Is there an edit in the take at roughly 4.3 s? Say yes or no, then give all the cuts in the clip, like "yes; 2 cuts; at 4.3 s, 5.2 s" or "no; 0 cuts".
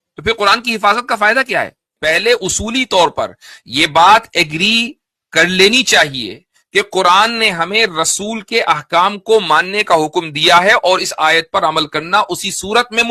no; 1 cut; at 1.9 s